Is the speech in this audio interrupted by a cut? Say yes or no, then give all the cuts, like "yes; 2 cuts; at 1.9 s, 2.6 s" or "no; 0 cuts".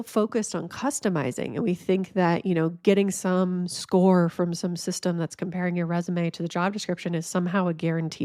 no; 0 cuts